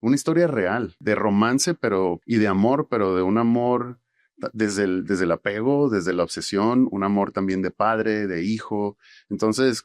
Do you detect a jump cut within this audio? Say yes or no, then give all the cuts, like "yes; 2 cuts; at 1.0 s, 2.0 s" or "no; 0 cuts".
yes; 2 cuts; at 0.9 s, 2.2 s